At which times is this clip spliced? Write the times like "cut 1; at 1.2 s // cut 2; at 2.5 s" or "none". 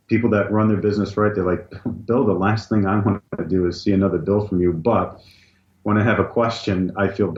none